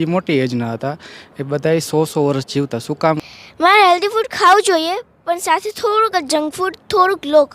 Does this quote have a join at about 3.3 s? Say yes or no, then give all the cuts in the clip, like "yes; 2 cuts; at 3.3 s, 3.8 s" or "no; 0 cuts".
yes; 1 cut; at 3.3 s